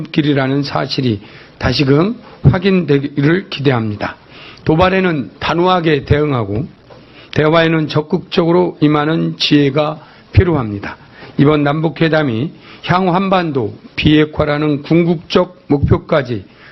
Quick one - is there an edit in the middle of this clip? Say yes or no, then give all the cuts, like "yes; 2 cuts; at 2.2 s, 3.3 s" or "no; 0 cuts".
no; 0 cuts